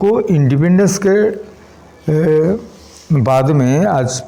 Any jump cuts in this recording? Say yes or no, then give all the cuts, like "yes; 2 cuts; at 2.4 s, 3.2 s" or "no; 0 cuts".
no; 0 cuts